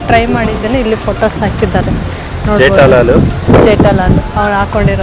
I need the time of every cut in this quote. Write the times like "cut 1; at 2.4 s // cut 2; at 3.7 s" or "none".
none